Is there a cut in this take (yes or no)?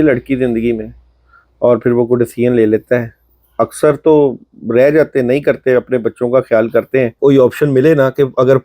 yes